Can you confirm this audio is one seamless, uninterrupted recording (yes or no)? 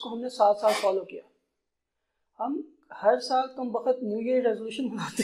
yes